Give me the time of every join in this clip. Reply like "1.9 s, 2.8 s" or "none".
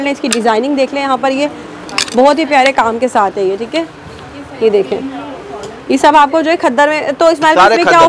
none